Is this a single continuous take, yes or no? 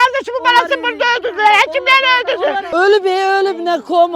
no